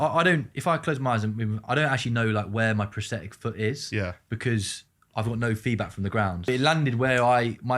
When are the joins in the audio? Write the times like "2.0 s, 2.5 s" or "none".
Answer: 6.5 s